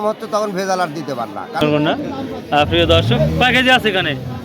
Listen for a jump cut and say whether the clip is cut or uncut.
cut